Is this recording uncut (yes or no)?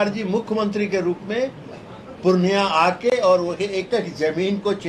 yes